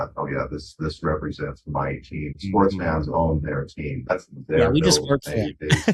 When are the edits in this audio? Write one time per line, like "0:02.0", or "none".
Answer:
0:02.3
0:04.1